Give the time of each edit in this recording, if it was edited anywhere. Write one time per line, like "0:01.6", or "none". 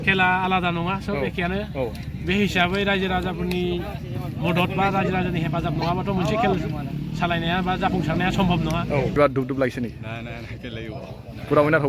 0:09.2